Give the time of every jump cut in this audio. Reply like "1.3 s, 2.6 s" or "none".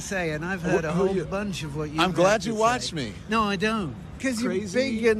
4.2 s